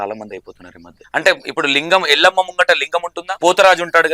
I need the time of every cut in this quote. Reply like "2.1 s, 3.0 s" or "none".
0.9 s, 3.2 s